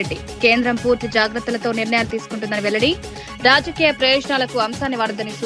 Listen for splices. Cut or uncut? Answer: uncut